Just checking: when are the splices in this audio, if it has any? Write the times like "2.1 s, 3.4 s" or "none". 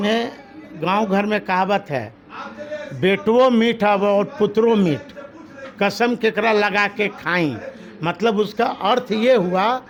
none